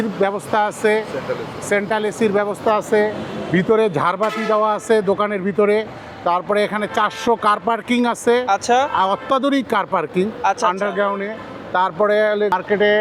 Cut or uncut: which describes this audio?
uncut